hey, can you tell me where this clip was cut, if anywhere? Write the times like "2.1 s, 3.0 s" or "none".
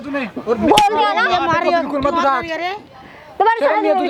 none